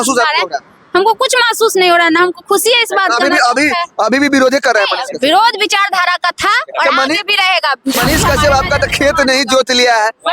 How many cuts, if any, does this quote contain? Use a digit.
1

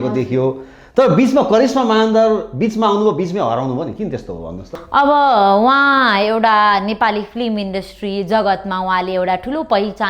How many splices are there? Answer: 0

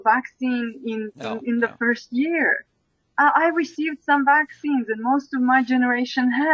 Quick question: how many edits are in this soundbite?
0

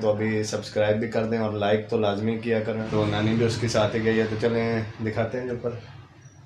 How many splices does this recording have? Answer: 1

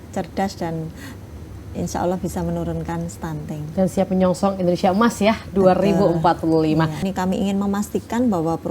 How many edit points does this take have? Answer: 1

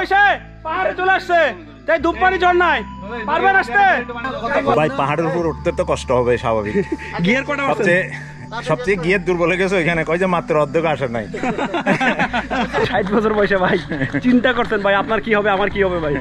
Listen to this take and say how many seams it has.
0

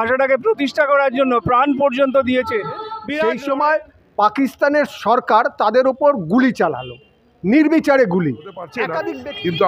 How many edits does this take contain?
2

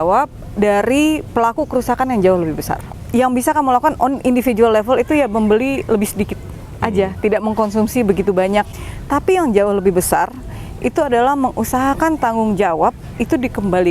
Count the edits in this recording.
2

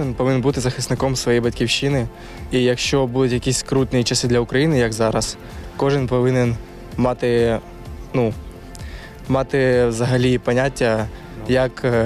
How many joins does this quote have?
0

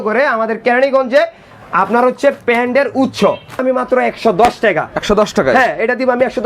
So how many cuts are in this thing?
1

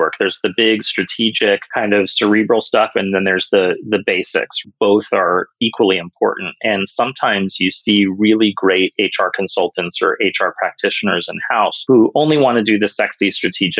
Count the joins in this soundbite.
3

